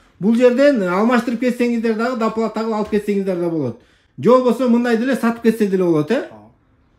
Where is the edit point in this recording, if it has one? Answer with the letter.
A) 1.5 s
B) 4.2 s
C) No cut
C